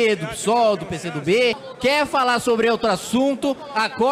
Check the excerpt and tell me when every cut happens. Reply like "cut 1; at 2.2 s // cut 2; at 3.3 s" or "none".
cut 1; at 1.7 s